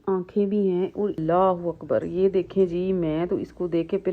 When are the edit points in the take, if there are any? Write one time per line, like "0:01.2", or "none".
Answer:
0:01.2